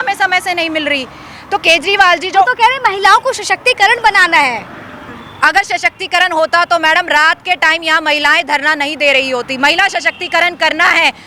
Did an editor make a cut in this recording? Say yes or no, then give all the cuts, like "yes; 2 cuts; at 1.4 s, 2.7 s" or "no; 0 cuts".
no; 0 cuts